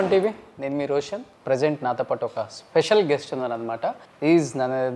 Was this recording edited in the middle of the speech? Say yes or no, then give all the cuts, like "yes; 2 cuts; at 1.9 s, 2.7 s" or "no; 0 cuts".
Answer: yes; 2 cuts; at 1.3 s, 4.1 s